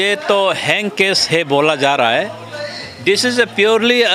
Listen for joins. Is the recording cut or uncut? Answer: uncut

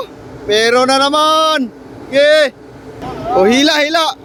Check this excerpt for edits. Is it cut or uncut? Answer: uncut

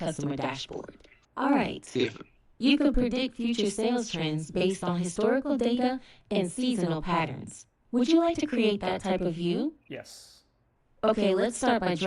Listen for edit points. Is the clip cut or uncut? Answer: cut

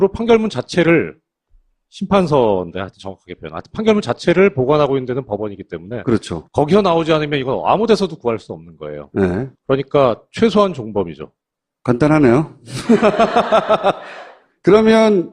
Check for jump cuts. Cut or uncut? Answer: uncut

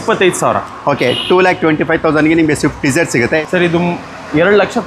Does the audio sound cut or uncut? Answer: cut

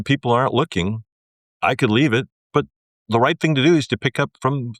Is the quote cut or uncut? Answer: cut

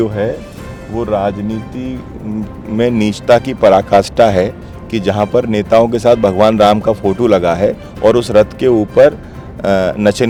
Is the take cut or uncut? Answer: uncut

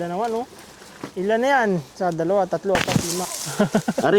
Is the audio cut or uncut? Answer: cut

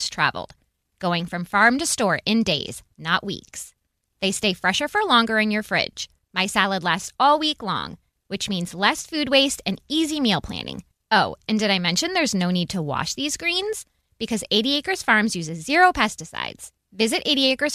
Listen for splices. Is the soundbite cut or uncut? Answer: uncut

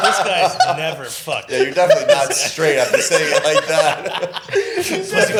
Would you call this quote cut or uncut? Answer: uncut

